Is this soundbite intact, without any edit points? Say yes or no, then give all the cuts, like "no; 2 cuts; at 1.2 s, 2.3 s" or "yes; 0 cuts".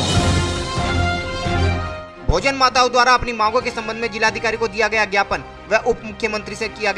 yes; 0 cuts